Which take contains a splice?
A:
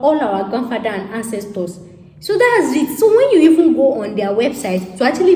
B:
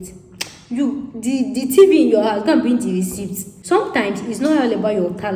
B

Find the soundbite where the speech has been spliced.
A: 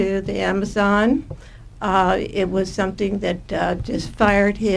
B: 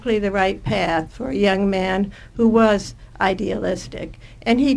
B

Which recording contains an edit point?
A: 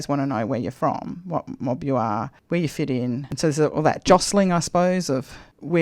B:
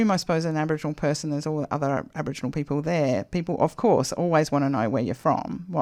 A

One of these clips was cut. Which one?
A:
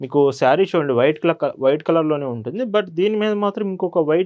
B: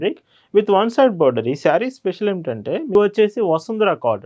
B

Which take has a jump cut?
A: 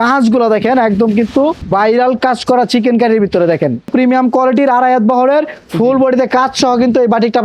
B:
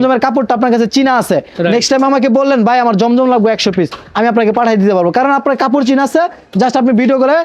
A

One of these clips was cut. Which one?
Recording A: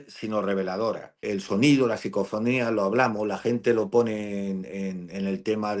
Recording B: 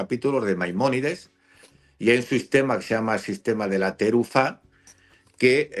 A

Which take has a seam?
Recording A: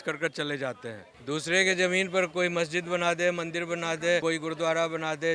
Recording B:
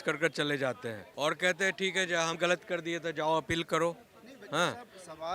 A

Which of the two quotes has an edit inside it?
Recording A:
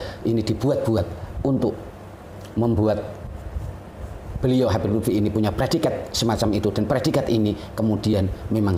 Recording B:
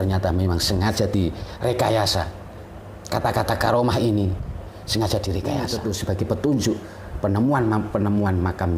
B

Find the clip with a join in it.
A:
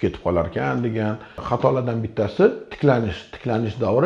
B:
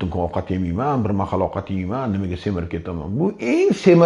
A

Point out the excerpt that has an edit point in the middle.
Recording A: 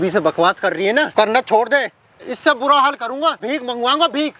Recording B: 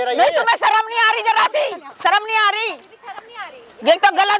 A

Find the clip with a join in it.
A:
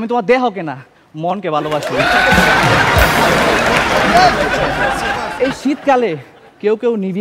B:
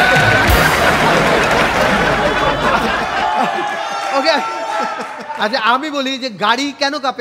A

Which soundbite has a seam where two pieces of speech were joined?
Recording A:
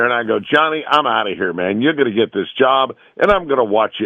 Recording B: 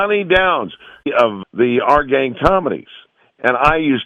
B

